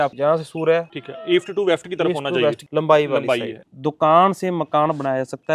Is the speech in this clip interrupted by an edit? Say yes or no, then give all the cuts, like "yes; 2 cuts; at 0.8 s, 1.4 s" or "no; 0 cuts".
yes; 3 cuts; at 1.0 s, 2.6 s, 3.6 s